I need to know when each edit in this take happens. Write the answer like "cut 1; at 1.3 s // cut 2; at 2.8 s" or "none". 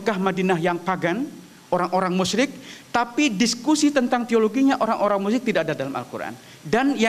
none